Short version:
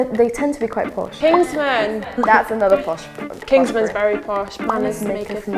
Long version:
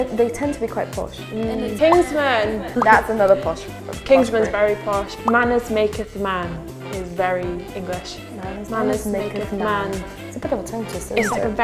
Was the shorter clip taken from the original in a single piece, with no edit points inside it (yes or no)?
no